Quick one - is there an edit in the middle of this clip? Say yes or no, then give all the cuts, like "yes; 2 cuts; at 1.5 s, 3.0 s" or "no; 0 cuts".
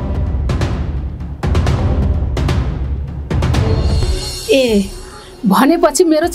yes; 1 cut; at 4.0 s